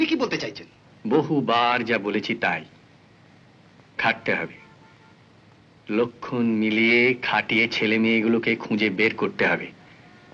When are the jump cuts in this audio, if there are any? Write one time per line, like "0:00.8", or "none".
none